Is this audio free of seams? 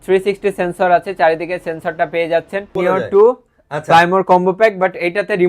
no; 1 cut; at 2.7 s

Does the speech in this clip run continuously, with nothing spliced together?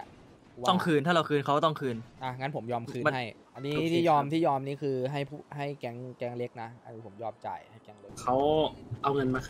no; 2 cuts; at 3.4 s, 8.1 s

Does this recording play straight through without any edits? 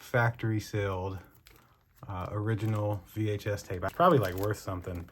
no; 1 cut; at 3.9 s

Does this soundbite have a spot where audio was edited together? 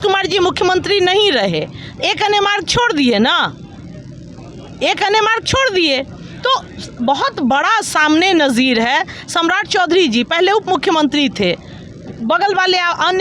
no; 0 cuts

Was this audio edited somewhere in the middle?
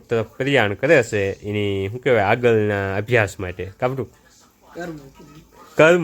no; 0 cuts

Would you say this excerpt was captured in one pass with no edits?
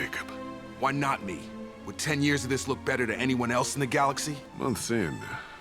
no; 1 cut; at 4.3 s

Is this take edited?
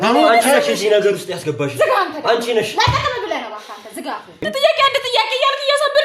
yes; 1 cut; at 4.4 s

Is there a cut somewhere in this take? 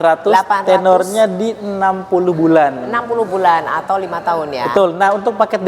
no; 0 cuts

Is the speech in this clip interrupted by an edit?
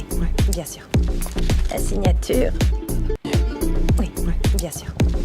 yes; 1 cut; at 3.1 s

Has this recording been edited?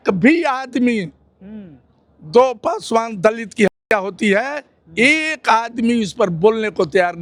no; 0 cuts

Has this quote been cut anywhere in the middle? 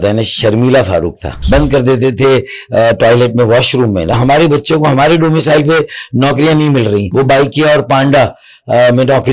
yes; 3 cuts; at 1.3 s, 4.2 s, 7.1 s

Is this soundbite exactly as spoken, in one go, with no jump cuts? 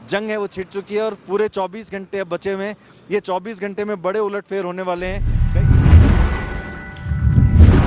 no; 1 cut; at 5.3 s

